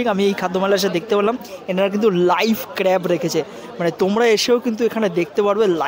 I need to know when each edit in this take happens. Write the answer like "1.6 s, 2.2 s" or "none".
none